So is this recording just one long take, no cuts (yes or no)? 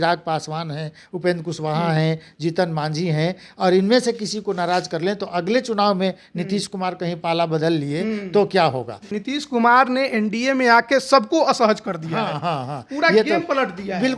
no